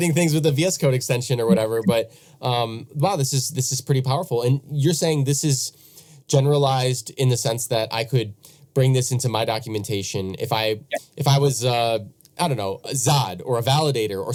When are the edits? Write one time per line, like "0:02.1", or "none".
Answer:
none